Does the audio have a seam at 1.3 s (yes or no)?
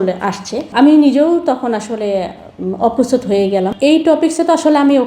no